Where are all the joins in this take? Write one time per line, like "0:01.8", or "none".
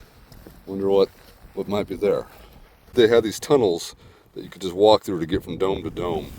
0:02.9